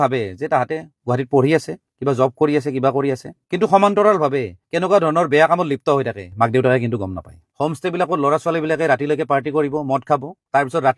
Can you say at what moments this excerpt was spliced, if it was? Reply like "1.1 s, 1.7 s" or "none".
7.3 s